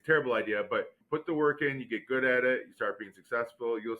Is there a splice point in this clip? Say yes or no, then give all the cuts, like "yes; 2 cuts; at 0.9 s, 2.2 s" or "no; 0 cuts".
yes; 1 cut; at 1.0 s